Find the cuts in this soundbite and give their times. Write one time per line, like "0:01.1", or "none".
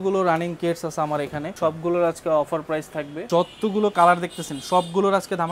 0:01.4
0:03.3